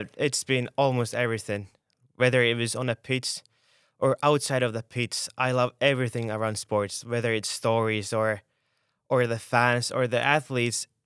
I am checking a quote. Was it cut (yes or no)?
no